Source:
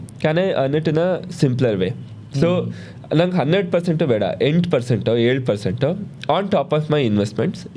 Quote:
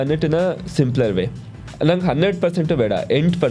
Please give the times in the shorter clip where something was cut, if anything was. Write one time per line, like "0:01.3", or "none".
0:01.5